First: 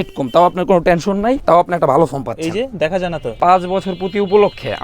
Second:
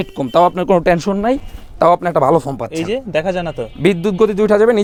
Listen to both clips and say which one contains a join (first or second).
first